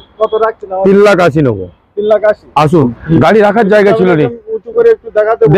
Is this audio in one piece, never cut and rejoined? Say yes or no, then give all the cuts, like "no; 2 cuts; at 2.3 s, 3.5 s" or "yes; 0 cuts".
no; 1 cut; at 2.9 s